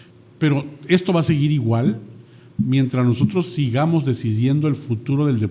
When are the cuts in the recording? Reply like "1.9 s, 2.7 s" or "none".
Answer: none